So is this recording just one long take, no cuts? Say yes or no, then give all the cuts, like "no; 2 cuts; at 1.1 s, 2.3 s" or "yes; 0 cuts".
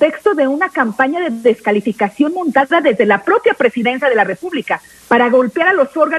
yes; 0 cuts